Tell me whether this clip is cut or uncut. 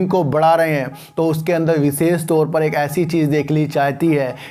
uncut